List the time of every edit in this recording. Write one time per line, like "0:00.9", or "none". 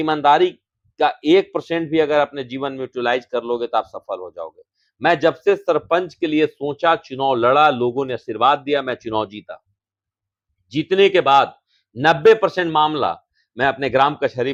none